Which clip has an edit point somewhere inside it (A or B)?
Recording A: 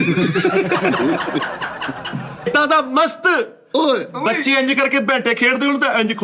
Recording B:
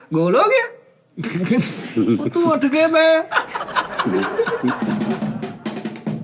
A